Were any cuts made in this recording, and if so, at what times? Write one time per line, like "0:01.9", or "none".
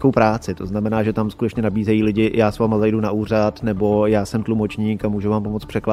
none

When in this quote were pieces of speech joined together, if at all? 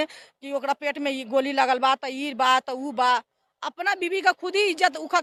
none

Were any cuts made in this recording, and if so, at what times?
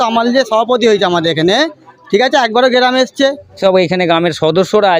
0:03.6

